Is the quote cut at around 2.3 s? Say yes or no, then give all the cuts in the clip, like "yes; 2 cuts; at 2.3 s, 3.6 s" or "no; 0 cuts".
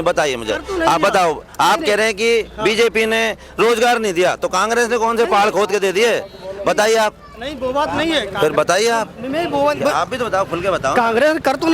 no; 0 cuts